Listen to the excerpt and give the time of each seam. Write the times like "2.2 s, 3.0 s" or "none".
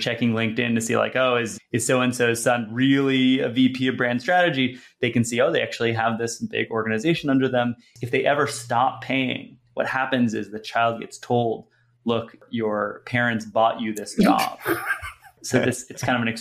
1.5 s, 7.9 s, 12.4 s, 15.4 s